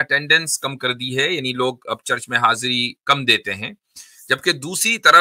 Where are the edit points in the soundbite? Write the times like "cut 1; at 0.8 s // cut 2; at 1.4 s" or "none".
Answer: none